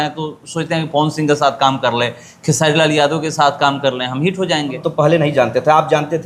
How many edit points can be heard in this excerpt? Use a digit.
1